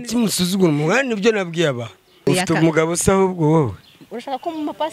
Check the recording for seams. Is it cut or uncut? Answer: cut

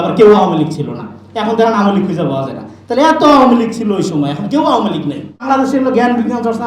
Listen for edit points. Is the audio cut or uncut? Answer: cut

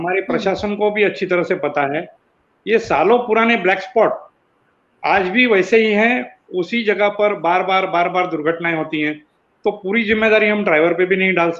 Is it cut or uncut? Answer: uncut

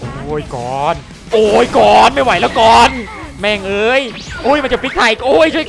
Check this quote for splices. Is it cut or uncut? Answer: uncut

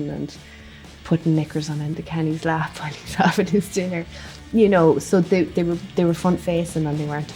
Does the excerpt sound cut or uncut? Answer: uncut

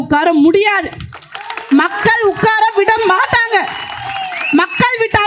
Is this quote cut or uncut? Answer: uncut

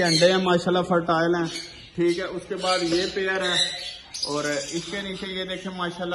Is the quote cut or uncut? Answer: uncut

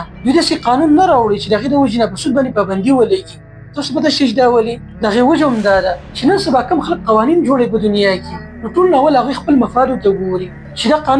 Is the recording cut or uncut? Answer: uncut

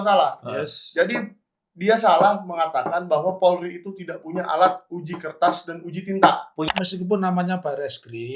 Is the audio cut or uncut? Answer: cut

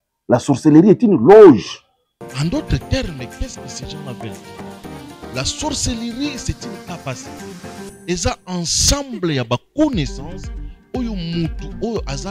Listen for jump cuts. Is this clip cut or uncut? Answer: cut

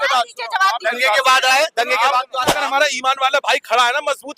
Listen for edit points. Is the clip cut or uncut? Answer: cut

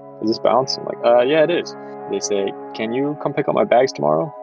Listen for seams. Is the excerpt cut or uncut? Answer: cut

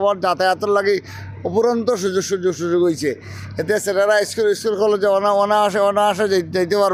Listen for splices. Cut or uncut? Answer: uncut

